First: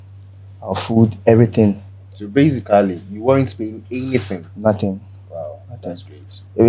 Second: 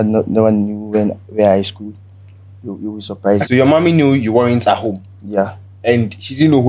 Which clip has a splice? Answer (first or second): second